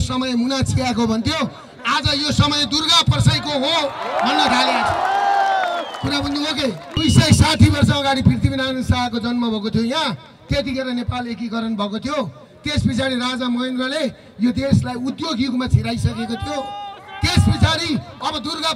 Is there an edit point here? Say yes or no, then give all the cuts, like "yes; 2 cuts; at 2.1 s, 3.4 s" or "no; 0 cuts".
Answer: yes; 1 cut; at 7.0 s